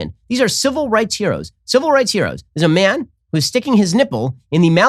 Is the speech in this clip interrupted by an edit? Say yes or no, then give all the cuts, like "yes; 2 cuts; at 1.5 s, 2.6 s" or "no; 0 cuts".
no; 0 cuts